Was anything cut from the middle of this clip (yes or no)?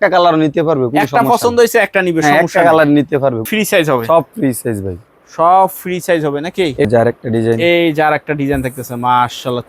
yes